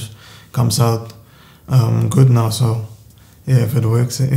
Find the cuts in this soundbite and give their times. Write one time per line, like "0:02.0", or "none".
none